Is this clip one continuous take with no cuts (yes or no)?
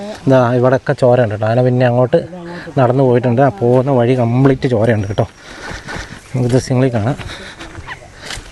yes